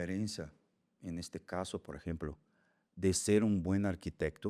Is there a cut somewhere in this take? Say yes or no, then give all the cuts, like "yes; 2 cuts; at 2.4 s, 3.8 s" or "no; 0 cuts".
no; 0 cuts